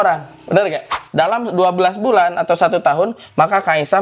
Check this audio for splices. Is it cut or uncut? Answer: cut